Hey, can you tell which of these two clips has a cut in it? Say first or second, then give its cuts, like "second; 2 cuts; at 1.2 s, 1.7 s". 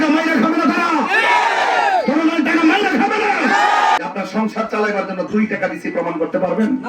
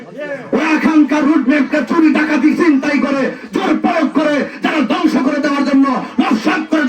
first; 1 cut; at 4.0 s